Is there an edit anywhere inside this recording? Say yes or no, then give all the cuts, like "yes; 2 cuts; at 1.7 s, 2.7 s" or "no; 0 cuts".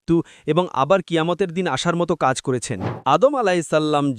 yes; 1 cut; at 2.9 s